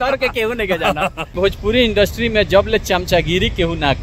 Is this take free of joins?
no; 1 cut; at 1.4 s

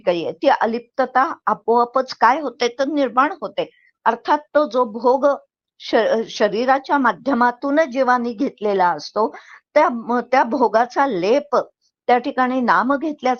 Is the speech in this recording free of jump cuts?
yes; 0 cuts

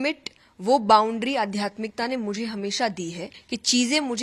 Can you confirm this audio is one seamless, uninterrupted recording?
no; 1 cut; at 3.3 s

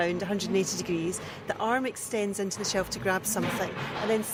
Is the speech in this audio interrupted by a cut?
no; 0 cuts

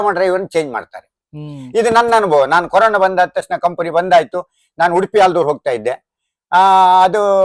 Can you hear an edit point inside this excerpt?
no; 0 cuts

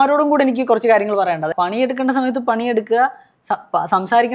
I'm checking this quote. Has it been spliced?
yes; 1 cut; at 1.5 s

